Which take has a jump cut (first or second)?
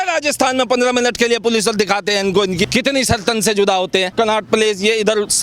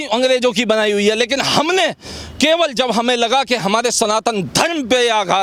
first